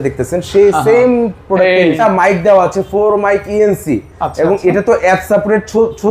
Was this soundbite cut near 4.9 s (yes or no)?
no